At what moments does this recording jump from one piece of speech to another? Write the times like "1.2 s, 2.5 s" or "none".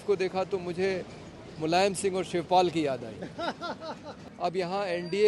4.2 s

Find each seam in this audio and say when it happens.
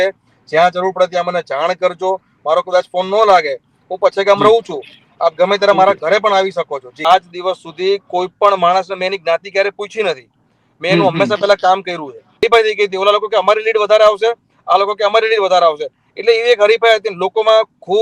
7.0 s, 12.4 s

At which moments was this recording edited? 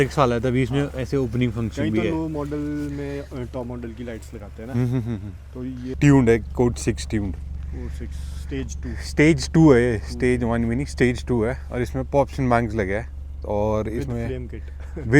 5.9 s

